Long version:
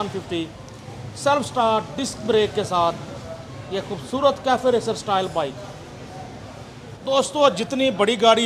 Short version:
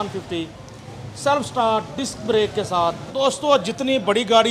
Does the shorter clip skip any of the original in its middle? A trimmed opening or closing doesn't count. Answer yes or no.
yes